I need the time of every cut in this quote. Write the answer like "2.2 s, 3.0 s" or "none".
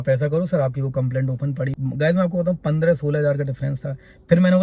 1.7 s